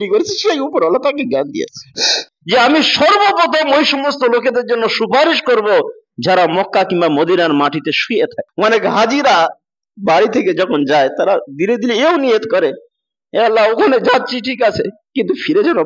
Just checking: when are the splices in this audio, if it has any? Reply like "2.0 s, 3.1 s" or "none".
2.2 s